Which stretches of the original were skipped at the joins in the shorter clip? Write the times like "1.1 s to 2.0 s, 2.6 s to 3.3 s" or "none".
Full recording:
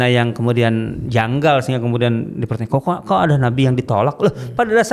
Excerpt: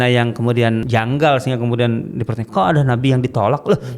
0.8 s to 1.1 s, 2.7 s to 3.0 s